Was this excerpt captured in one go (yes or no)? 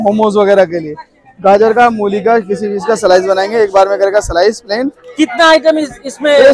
yes